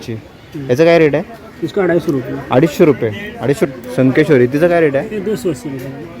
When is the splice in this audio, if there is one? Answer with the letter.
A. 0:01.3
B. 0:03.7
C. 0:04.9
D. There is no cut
B